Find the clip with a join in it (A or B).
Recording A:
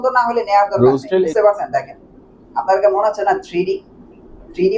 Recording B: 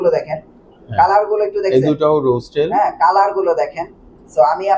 A